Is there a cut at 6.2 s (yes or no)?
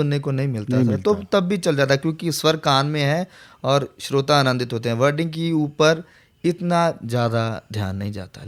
no